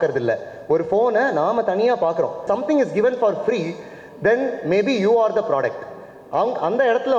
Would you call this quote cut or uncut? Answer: cut